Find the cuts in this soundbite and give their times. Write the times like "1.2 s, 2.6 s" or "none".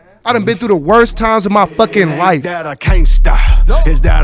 2.5 s